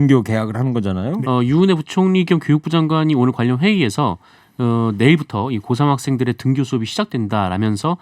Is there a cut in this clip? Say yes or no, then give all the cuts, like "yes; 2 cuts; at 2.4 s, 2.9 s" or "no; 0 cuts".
yes; 1 cut; at 1.2 s